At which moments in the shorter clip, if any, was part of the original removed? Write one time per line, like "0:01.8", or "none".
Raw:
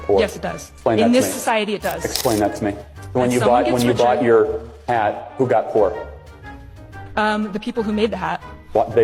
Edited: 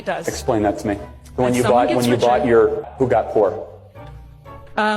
0:02.9